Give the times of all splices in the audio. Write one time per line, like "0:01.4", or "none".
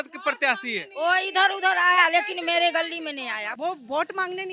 0:03.5